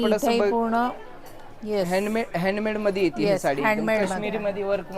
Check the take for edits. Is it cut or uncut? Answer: uncut